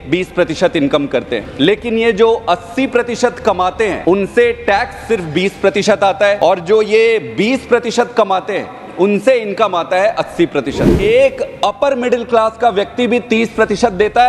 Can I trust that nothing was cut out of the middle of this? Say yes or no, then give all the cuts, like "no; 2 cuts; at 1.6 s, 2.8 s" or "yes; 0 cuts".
no; 4 cuts; at 1.4 s, 4.0 s, 6.4 s, 10.9 s